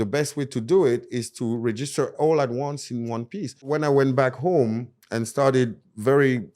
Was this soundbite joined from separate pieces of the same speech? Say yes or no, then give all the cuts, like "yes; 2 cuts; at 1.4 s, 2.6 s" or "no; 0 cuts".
yes; 1 cut; at 3.7 s